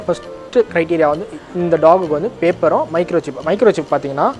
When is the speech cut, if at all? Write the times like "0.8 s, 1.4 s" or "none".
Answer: none